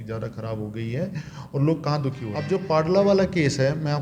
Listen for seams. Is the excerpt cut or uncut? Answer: cut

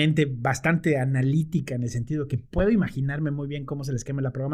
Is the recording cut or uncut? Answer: uncut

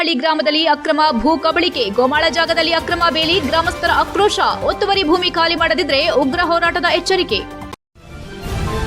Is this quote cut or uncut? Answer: cut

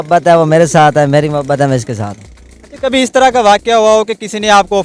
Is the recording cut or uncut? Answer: uncut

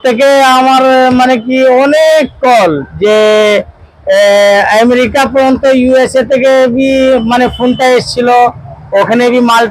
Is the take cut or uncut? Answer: uncut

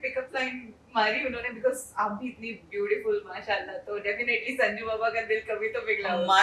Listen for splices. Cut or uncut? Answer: uncut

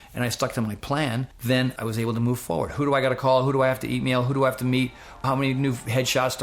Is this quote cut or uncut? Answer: cut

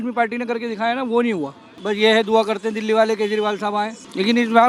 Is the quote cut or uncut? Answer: uncut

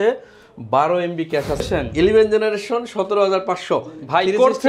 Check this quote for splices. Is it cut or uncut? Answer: cut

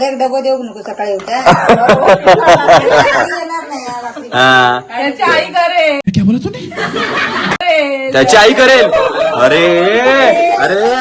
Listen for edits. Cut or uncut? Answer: uncut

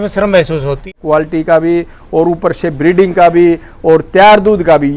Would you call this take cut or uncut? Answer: cut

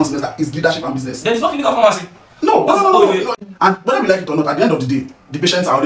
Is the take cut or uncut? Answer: cut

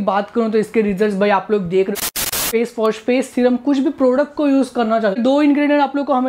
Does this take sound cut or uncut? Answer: cut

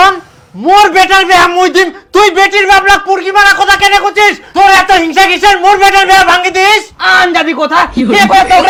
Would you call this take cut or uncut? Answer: uncut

